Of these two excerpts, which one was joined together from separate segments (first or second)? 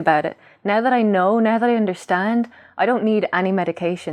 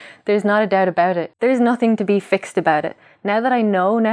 second